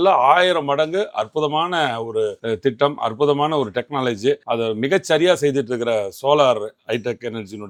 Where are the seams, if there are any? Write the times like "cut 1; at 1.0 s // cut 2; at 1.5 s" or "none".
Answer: none